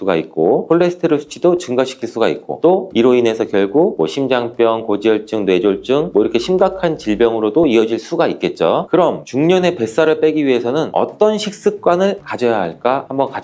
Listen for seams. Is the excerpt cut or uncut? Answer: cut